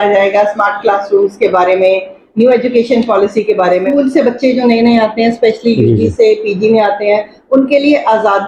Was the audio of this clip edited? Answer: yes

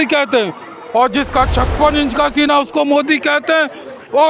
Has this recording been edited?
yes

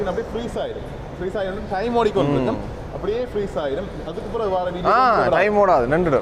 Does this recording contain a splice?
no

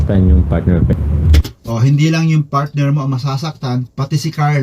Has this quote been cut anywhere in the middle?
yes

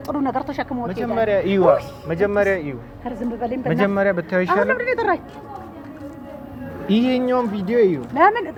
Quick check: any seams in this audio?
no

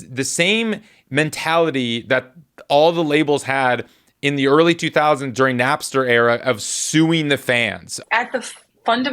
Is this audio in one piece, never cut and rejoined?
no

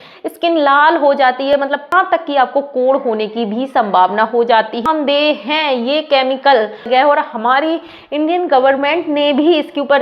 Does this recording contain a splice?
yes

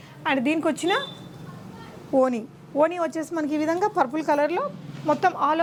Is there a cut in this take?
no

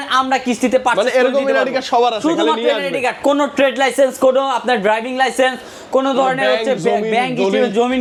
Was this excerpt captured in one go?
yes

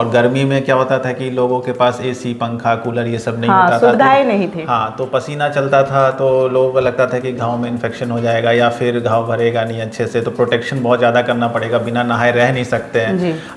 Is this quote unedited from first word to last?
yes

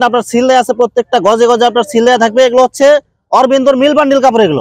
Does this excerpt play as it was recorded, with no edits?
yes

